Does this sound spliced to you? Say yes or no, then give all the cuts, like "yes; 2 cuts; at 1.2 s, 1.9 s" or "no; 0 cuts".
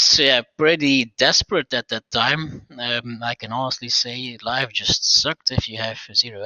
no; 0 cuts